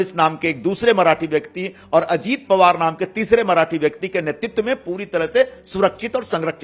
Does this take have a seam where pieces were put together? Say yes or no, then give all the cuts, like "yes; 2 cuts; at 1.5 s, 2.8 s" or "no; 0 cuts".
no; 0 cuts